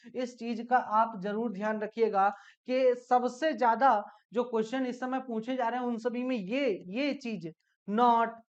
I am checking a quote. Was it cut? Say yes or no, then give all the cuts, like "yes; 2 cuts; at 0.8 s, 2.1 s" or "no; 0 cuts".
no; 0 cuts